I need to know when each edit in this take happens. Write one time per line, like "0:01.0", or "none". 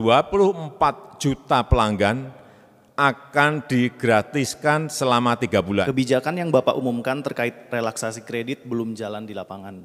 0:05.9